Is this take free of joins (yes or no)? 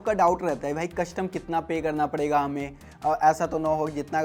yes